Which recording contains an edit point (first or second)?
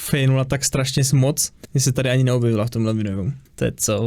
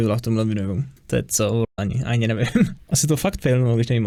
first